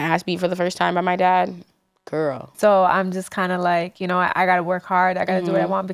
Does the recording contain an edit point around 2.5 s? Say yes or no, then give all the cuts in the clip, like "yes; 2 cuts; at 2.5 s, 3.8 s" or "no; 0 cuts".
yes; 1 cut; at 2.5 s